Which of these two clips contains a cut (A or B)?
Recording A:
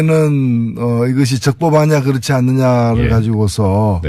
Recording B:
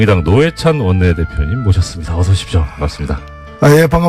A